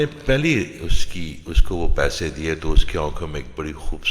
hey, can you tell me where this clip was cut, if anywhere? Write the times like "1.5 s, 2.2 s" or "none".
none